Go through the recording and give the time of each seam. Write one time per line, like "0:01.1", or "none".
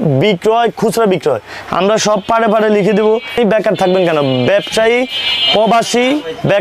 0:03.4